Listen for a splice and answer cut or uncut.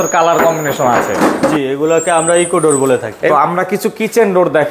cut